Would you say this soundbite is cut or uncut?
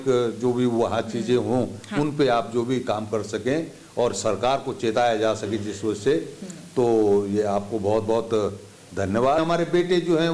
cut